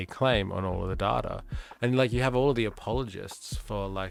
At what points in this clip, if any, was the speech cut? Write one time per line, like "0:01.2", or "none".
none